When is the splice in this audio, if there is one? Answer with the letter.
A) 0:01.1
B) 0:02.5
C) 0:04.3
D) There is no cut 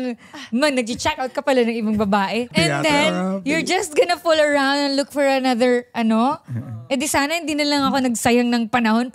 B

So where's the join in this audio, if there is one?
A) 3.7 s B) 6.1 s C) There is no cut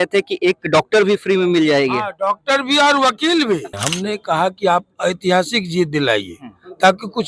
A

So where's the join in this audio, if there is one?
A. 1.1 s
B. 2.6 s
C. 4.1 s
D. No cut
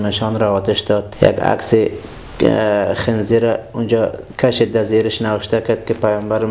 A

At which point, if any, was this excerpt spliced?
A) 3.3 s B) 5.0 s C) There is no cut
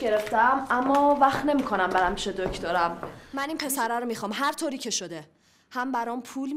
A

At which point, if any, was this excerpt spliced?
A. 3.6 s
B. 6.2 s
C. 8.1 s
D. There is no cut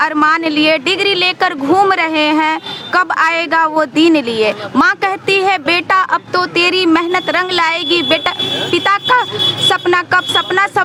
D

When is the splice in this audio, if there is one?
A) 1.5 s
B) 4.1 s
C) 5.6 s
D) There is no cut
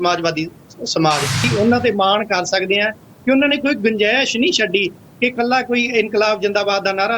A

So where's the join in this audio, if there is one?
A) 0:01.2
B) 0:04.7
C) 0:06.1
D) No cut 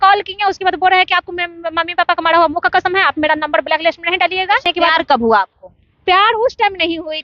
B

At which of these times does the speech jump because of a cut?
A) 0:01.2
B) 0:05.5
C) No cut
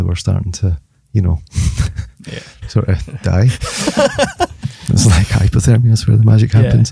C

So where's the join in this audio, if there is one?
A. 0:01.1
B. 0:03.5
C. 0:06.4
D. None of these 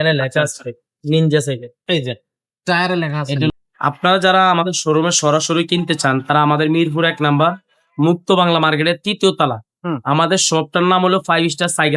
B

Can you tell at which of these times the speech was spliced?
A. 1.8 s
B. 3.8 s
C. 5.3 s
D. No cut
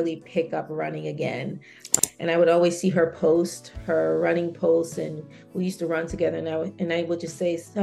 A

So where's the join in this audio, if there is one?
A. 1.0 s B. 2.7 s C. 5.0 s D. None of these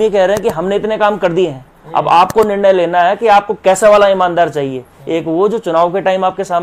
D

